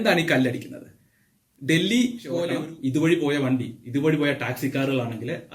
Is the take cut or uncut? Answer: cut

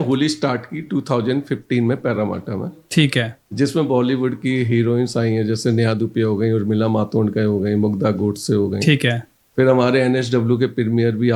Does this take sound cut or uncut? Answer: uncut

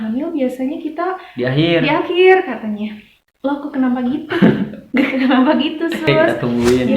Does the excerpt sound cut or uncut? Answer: cut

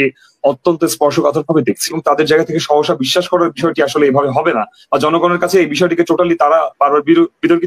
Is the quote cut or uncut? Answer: cut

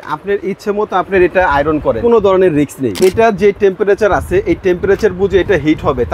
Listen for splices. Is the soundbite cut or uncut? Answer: cut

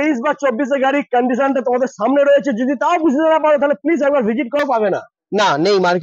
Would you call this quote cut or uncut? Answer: cut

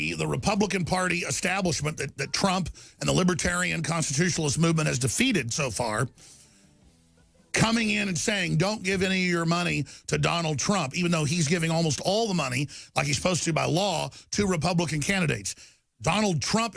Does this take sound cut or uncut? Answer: uncut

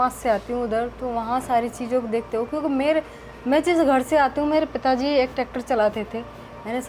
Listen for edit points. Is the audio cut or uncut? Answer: uncut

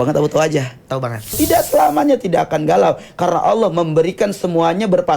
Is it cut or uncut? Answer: cut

